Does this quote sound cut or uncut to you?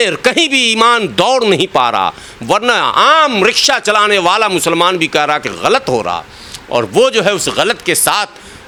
uncut